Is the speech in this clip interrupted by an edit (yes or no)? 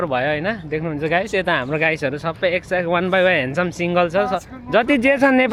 no